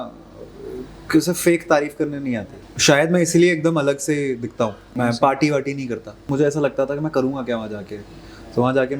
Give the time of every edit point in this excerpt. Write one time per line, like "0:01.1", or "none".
0:02.5
0:04.9
0:06.3